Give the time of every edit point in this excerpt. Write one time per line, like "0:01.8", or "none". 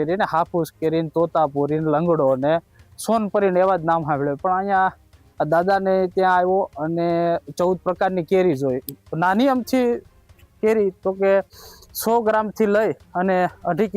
none